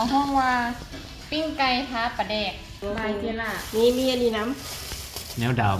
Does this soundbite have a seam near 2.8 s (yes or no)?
yes